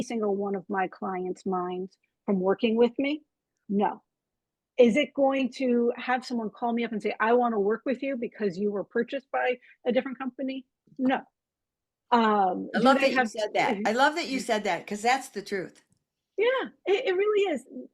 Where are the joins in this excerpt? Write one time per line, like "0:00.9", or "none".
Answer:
none